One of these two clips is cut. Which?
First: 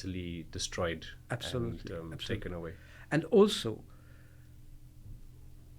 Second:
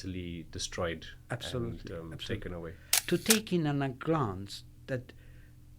second; 1 cut; at 2.9 s

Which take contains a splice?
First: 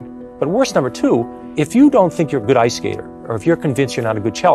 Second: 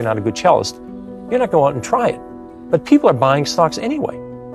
first; 1 cut; at 1.4 s

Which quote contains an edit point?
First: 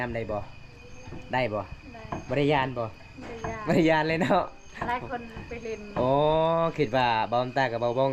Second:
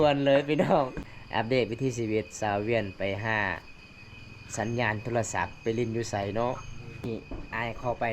second; 2 cuts; at 1.0 s, 7.1 s

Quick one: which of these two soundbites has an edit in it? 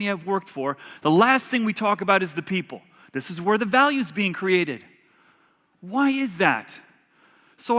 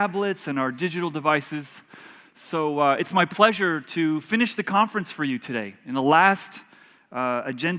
first; 1 cut; at 6.5 s

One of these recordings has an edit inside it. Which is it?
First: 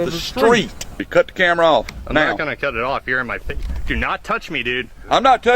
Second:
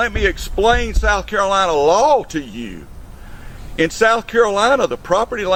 first; 1 cut; at 1.0 s

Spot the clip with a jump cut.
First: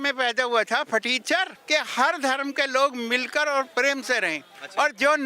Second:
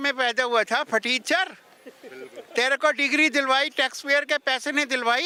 first; 1 cut; at 1.6 s

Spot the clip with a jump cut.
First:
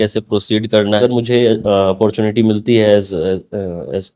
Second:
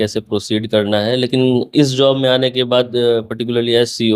first; 1 cut; at 1.0 s

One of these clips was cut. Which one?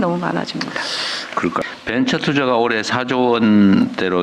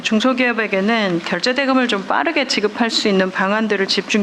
first; 1 cut; at 1.6 s

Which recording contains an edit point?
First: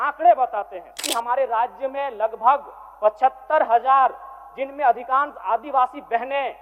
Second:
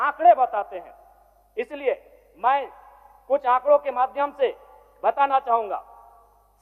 first; 1 cut; at 1.0 s

